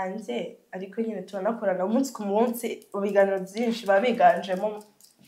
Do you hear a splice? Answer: no; 0 cuts

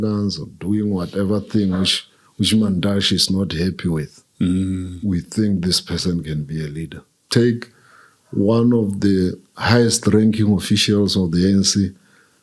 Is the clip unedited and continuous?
no; 1 cut; at 7.1 s

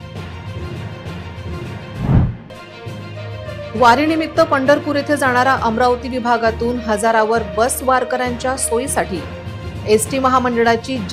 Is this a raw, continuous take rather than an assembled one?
yes; 0 cuts

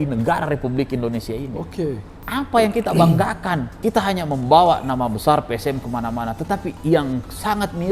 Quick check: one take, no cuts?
no; 2 cuts; at 2.1 s, 3.7 s

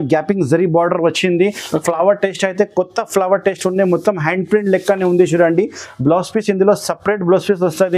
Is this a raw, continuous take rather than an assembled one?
yes; 0 cuts

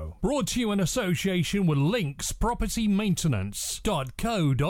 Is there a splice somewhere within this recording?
no; 0 cuts

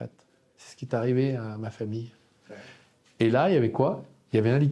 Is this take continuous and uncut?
yes; 0 cuts

